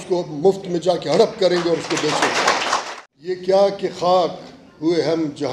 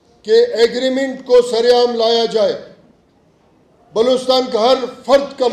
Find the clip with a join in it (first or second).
first